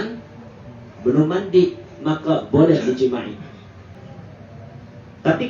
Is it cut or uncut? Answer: cut